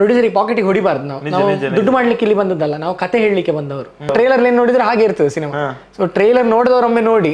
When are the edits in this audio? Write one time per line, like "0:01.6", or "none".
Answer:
0:04.1